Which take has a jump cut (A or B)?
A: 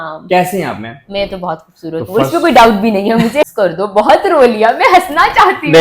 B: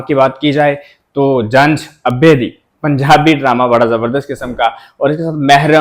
A